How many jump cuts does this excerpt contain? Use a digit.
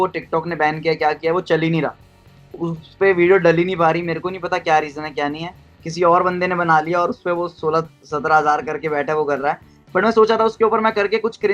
0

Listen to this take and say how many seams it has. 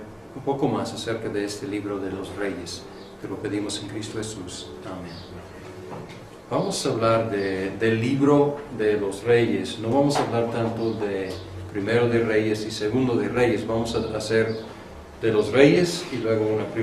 0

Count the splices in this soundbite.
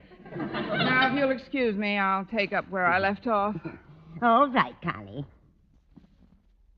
1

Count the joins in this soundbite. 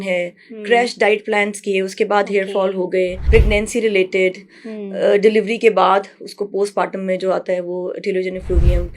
1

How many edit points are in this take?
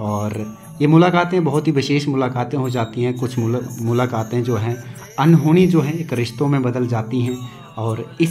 0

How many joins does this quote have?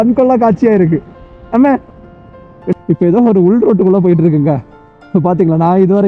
1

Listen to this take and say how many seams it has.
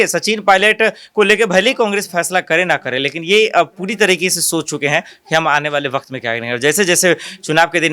0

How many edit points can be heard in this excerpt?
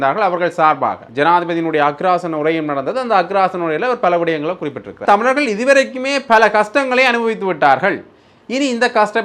2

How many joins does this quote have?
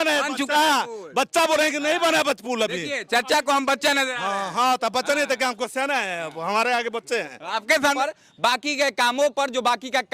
1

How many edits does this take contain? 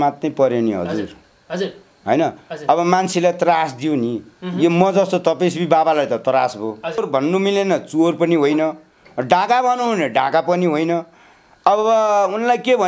1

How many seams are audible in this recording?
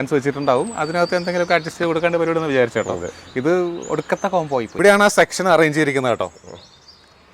1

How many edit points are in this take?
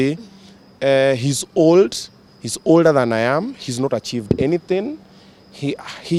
0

